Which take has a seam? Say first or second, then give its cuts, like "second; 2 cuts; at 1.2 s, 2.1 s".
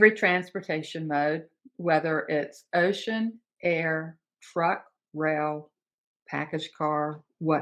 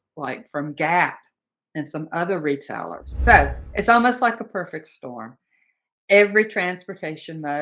second; 1 cut; at 3.0 s